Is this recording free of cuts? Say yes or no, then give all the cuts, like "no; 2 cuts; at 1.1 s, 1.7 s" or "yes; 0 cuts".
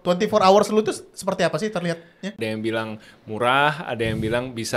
no; 1 cut; at 2.4 s